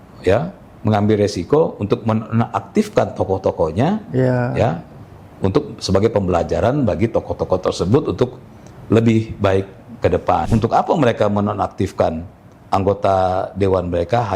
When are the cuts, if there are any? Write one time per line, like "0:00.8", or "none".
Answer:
0:10.5